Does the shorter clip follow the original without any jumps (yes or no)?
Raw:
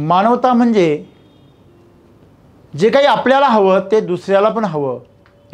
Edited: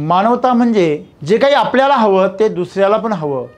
no